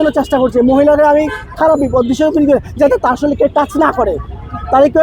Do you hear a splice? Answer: no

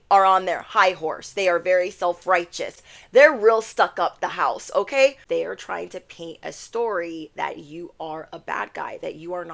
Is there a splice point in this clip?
yes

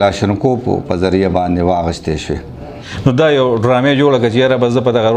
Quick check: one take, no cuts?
no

